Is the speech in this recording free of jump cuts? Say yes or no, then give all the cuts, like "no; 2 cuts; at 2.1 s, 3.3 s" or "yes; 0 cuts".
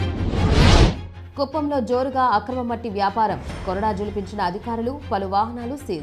yes; 0 cuts